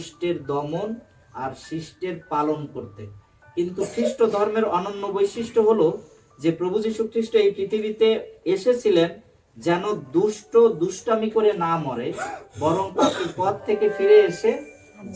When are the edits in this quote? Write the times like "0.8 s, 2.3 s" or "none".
none